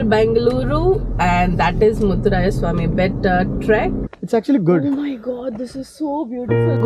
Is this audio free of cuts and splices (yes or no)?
no